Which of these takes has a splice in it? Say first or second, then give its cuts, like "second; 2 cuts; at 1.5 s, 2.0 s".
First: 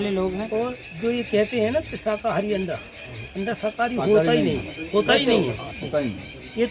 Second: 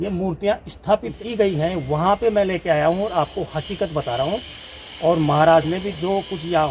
second; 1 cut; at 1.1 s